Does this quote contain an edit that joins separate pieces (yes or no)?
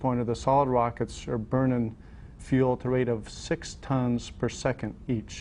yes